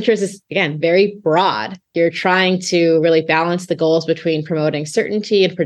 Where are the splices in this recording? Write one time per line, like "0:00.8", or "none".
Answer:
0:01.9